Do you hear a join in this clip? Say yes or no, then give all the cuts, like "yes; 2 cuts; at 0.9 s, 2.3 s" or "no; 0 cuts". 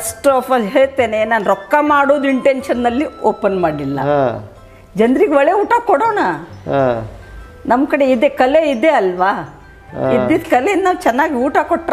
no; 0 cuts